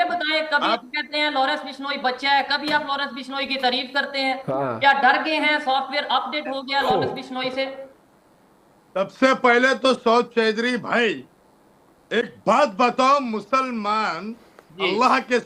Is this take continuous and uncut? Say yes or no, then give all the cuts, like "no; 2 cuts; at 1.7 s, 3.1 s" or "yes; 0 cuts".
yes; 0 cuts